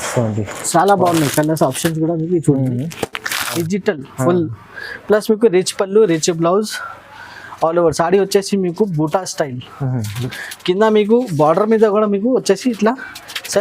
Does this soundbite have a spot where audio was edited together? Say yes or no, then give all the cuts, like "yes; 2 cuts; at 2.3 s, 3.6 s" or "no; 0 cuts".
yes; 1 cut; at 3.6 s